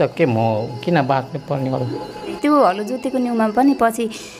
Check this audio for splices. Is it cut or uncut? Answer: cut